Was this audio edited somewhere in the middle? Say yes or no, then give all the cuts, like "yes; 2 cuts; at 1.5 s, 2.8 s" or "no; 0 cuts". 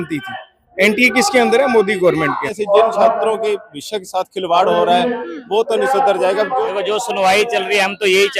yes; 2 cuts; at 2.5 s, 6.6 s